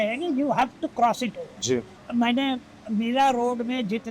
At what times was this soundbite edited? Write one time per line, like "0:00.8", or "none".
0:02.0